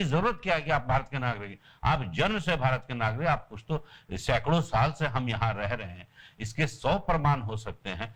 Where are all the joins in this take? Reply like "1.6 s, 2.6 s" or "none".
none